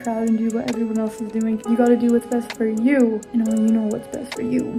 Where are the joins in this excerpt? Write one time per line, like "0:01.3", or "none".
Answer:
none